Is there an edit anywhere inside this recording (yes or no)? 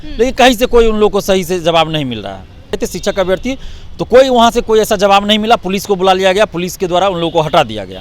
yes